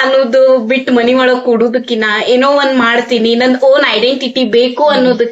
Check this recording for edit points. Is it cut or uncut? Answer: uncut